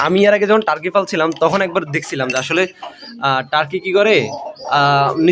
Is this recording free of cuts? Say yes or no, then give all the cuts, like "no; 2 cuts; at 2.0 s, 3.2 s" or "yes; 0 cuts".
yes; 0 cuts